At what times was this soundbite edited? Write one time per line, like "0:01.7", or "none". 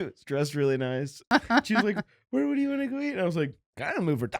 0:01.2